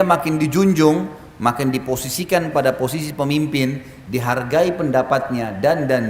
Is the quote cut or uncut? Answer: uncut